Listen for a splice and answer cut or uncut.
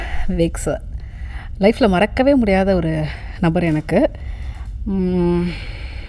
uncut